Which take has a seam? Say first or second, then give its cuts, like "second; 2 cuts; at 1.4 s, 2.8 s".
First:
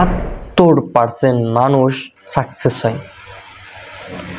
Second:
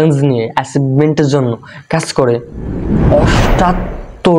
first; 1 cut; at 2.1 s